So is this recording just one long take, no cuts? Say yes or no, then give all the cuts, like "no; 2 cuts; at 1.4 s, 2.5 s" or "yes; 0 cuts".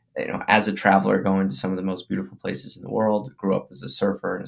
yes; 0 cuts